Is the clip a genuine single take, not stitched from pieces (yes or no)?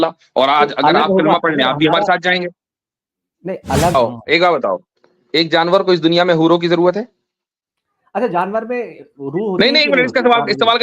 no